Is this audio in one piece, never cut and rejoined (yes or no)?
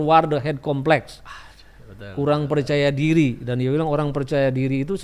yes